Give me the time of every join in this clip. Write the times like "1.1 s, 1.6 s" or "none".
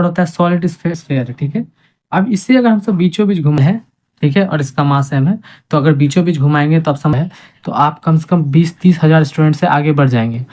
0.9 s, 3.6 s, 7.1 s